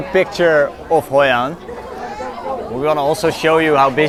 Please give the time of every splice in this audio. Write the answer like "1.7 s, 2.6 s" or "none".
none